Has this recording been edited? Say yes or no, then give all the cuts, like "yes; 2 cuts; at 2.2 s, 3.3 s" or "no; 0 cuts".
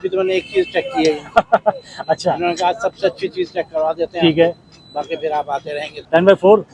yes; 1 cut; at 5.8 s